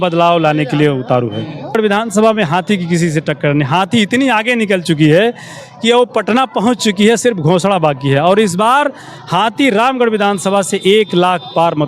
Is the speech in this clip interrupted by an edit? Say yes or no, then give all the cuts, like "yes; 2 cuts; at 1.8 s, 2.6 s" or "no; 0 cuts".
yes; 1 cut; at 1.8 s